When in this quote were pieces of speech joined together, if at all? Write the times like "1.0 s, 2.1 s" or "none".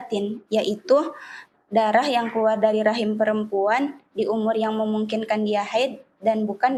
none

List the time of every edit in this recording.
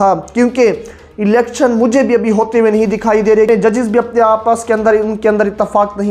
3.5 s

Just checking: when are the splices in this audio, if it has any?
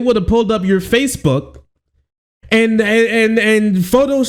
none

